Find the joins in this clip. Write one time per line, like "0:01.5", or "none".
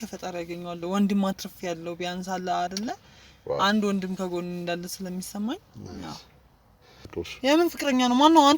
0:07.0

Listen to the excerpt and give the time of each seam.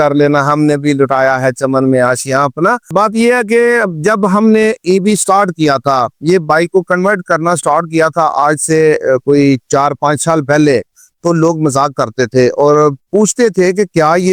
none

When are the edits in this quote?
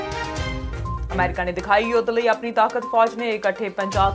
0:01.0

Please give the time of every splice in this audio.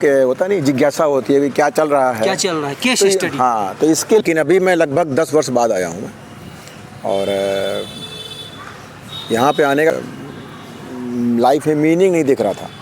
0:04.2
0:09.9

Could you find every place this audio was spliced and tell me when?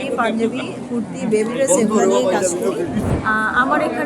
0:03.1

